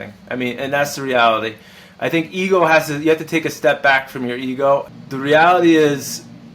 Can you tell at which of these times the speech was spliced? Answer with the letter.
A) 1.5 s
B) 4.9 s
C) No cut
B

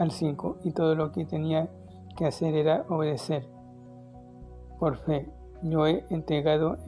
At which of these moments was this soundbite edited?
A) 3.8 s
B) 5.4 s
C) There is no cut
C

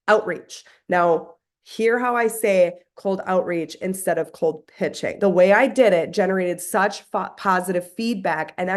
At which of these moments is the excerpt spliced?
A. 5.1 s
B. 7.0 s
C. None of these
A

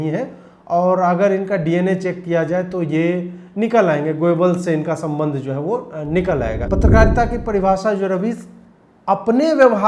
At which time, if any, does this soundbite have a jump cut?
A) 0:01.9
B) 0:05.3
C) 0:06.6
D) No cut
C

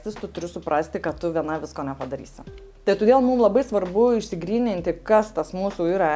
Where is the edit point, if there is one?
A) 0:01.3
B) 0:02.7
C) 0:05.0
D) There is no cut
B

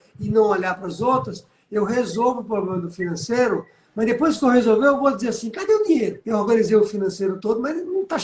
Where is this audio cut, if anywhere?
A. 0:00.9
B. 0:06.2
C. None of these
B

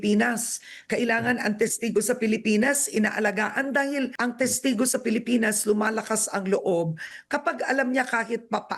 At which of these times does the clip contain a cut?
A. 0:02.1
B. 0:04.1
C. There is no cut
B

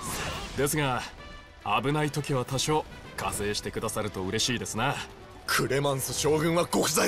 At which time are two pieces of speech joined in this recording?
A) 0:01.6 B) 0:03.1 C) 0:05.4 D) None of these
C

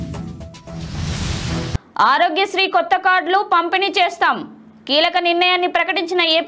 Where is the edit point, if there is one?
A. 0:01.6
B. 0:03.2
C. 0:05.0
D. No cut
A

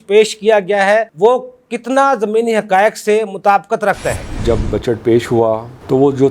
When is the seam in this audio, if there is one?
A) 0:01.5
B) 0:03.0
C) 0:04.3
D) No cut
C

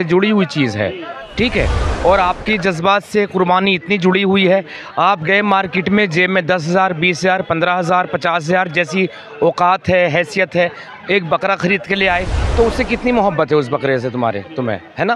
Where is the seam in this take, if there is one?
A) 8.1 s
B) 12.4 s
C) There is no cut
B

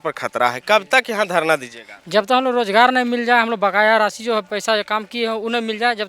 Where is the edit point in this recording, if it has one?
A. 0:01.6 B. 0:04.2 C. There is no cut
C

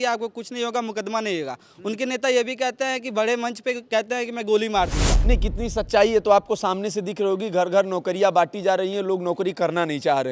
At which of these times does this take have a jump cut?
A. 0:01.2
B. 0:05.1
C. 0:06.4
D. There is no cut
B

